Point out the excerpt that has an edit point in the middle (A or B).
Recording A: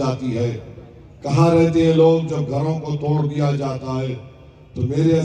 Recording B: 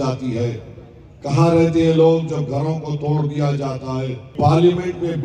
B